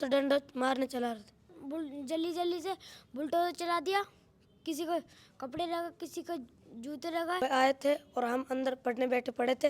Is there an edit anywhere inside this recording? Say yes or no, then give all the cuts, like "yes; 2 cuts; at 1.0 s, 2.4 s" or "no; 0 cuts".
yes; 2 cuts; at 1.6 s, 7.4 s